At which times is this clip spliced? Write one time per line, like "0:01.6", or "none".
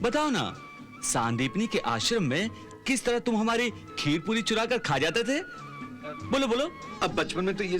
0:06.8